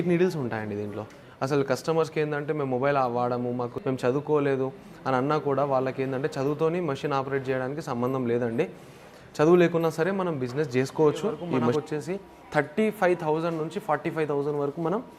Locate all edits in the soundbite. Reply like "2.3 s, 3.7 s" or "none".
1.3 s, 3.7 s, 11.7 s